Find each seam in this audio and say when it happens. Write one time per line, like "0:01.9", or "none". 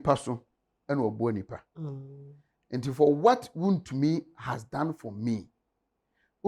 none